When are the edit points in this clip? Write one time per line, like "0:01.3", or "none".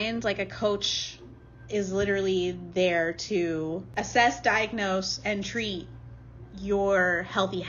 none